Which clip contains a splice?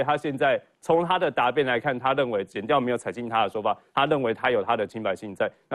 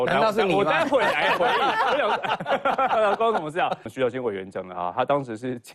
second; 1 cut; at 3.9 s

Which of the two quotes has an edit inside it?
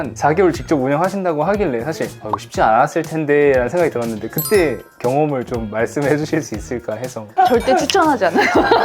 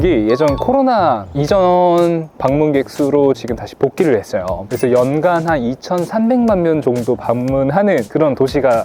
first; 1 cut; at 2.2 s

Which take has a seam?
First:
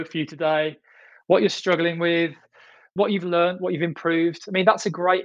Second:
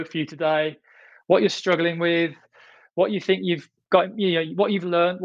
first; 1 cut; at 2.9 s

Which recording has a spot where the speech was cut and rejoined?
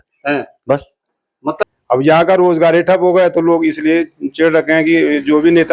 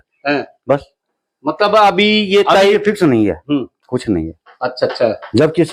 first; 1 cut; at 1.6 s

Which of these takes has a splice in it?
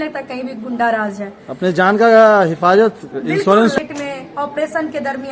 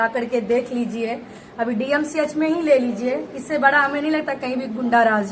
first; 1 cut; at 3.8 s

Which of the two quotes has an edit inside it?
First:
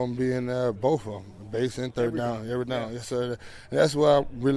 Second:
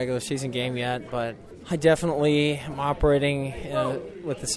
second; 1 cut; at 1.5 s

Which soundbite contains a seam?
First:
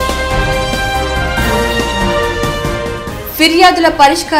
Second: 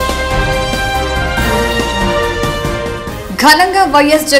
first; 1 cut; at 3.1 s

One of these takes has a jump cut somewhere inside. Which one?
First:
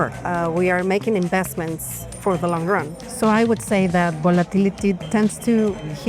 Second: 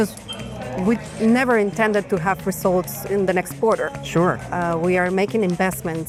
first; 2 cuts; at 3.0 s, 5.0 s

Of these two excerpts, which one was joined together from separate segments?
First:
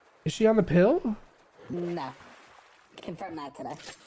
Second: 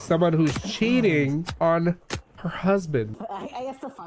second; 1 cut; at 3.2 s

